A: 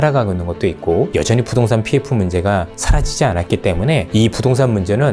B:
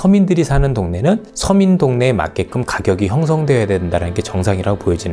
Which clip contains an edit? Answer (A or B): A